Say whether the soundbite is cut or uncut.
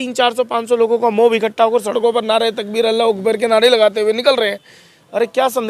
uncut